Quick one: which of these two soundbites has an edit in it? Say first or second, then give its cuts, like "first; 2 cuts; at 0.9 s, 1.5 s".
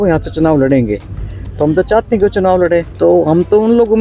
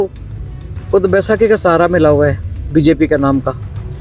first; 1 cut; at 2.9 s